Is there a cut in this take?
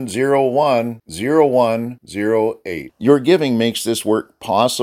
no; 0 cuts

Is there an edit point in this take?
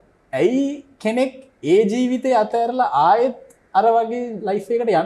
no; 0 cuts

